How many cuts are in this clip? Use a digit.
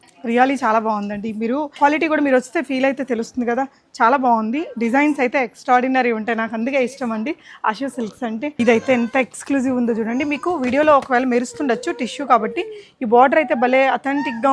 2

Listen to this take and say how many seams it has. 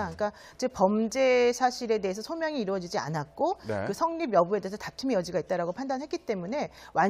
1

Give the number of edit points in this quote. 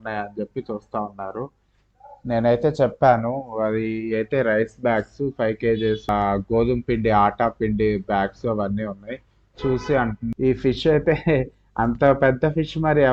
2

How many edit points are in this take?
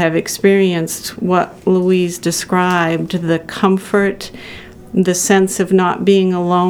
0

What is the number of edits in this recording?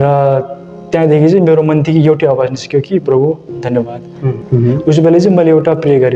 1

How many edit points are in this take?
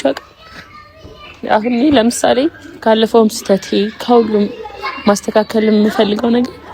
0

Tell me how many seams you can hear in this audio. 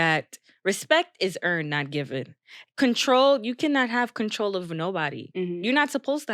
0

